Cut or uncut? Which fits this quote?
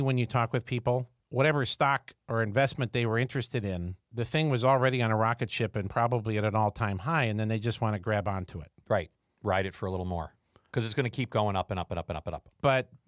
cut